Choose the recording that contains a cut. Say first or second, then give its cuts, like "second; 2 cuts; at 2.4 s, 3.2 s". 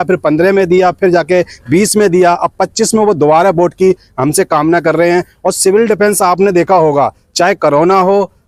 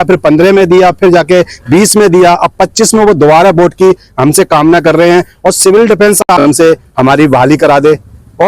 second; 1 cut; at 6.2 s